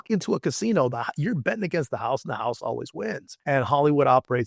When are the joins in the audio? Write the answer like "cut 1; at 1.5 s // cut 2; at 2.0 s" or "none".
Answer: cut 1; at 3.3 s